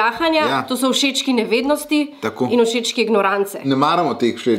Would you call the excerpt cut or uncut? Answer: cut